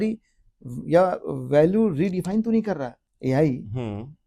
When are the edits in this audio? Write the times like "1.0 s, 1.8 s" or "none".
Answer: none